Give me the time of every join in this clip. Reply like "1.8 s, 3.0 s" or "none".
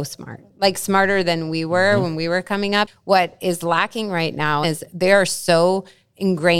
2.9 s, 4.6 s